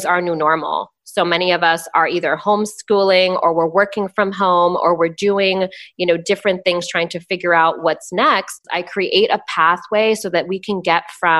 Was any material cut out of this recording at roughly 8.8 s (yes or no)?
yes